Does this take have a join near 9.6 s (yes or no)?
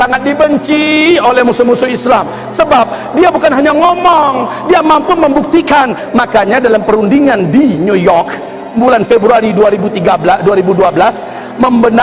no